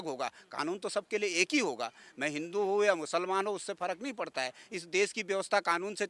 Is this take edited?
no; 0 cuts

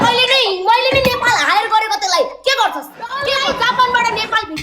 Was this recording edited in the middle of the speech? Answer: yes; 1 cut; at 3.2 s

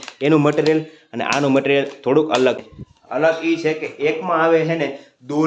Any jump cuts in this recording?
no; 0 cuts

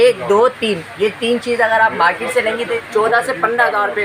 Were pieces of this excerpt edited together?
yes; 1 cut; at 2.8 s

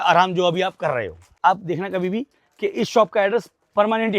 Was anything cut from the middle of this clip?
yes; 1 cut; at 1.3 s

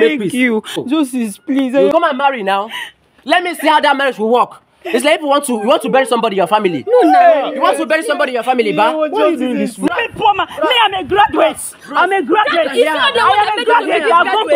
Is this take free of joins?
no; 3 cuts; at 0.8 s, 1.9 s, 9.9 s

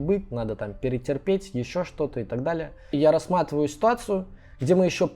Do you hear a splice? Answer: yes; 1 cut; at 3.0 s

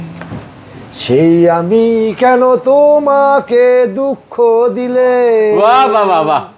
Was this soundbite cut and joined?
no; 0 cuts

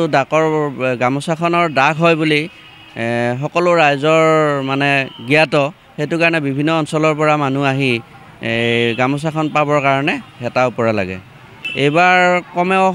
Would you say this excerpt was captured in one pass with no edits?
yes; 0 cuts

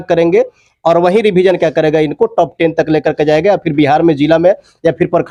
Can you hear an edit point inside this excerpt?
no; 0 cuts

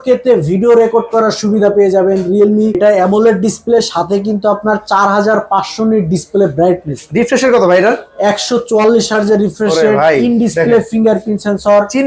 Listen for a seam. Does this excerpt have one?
no; 0 cuts

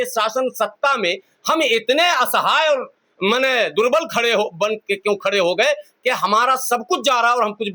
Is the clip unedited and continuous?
yes; 0 cuts

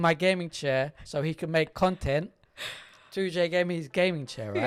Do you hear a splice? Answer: no; 0 cuts

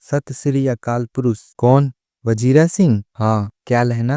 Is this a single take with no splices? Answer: no; 1 cut; at 1.5 s

